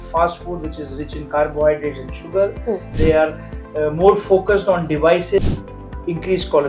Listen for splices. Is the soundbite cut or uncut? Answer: cut